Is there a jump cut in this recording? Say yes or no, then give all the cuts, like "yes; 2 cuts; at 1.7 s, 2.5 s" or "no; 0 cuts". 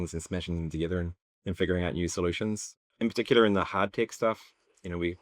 yes; 2 cuts; at 1.2 s, 2.6 s